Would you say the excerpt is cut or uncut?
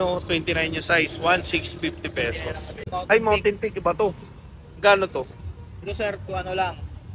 cut